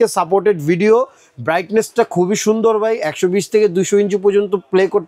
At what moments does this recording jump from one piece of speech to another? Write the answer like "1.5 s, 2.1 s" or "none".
none